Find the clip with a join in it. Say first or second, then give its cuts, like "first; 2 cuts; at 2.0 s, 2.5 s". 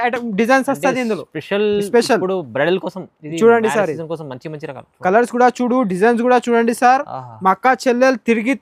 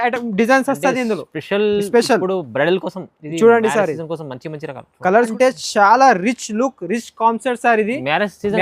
second; 1 cut; at 5.3 s